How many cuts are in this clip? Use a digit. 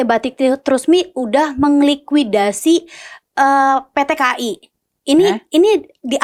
0